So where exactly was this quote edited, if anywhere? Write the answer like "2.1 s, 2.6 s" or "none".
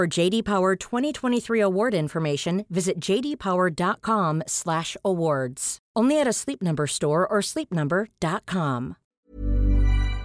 9.3 s